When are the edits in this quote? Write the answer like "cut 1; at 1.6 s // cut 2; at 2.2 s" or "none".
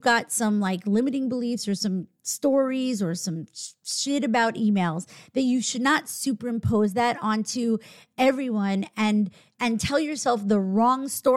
none